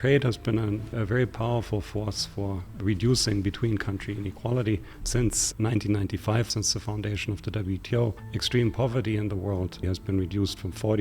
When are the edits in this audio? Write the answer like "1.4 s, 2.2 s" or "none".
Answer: 0.9 s, 2.7 s, 5.3 s, 6.5 s, 8.3 s, 9.9 s